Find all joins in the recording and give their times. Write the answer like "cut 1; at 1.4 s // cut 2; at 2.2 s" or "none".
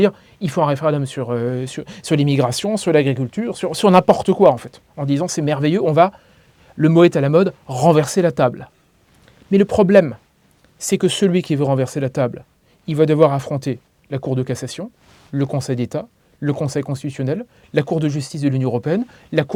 none